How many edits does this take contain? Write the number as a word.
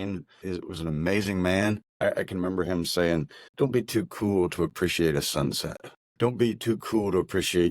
two